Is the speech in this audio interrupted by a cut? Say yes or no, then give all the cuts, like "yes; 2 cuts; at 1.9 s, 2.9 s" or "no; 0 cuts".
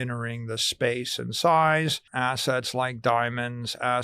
yes; 1 cut; at 2.0 s